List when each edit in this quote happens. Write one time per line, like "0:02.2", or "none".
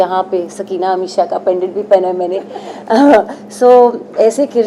none